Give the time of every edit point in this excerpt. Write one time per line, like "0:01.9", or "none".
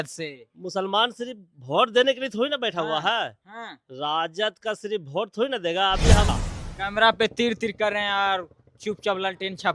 0:06.3